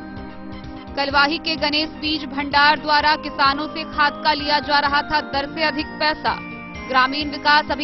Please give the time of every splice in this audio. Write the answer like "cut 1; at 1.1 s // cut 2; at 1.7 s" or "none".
cut 1; at 0.9 s